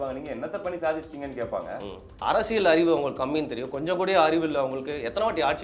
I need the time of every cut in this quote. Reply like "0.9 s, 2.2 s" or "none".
2.2 s